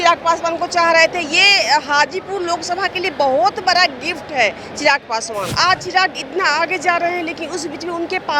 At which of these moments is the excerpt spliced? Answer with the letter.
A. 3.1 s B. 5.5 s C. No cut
B